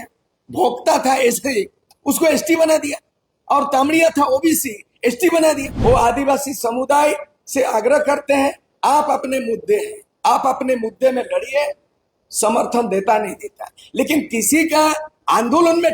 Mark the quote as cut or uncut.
cut